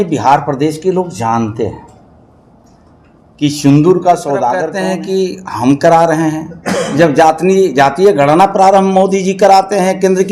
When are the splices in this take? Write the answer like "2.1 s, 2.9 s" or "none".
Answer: 4.7 s